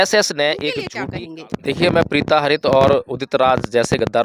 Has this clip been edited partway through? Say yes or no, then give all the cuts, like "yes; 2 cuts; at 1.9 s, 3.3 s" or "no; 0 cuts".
yes; 1 cut; at 0.9 s